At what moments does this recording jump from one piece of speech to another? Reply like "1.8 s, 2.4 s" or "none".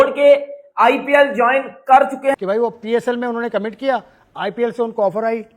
2.4 s